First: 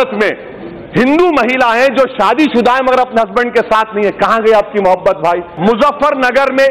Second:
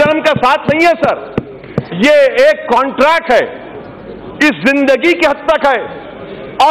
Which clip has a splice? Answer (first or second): first